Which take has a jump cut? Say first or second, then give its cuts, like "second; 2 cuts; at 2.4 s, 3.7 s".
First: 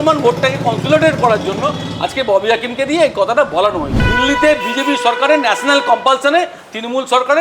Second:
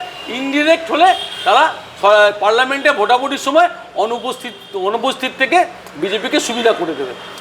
first; 1 cut; at 4.0 s